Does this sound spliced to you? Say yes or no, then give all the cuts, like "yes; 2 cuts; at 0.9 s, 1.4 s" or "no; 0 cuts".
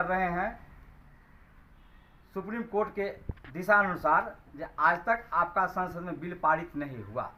no; 0 cuts